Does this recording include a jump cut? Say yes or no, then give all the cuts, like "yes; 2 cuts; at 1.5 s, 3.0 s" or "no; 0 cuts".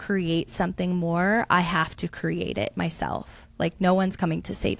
no; 0 cuts